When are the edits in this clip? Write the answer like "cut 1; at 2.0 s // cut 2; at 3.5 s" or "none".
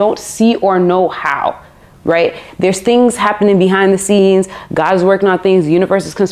none